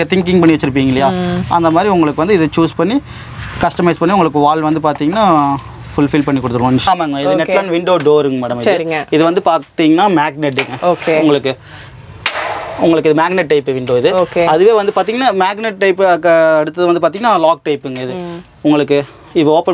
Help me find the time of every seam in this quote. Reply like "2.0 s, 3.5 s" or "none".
6.8 s